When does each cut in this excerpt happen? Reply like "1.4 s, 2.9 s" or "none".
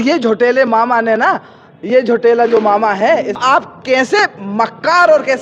3.4 s